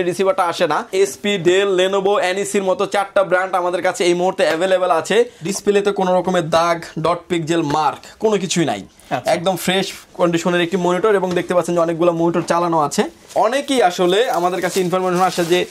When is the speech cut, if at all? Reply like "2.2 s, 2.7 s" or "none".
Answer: 0.9 s, 5.4 s, 13.3 s